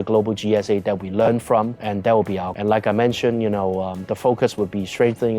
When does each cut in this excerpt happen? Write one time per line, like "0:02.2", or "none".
0:02.5